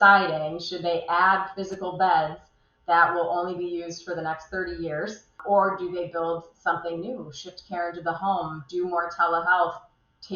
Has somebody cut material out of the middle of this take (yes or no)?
yes